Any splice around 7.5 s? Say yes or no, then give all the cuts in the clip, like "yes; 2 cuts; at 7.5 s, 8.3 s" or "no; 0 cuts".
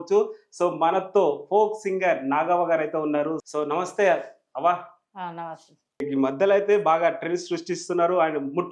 no; 2 cuts; at 3.4 s, 6.0 s